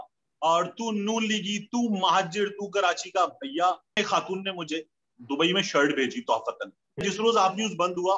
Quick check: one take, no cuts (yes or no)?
no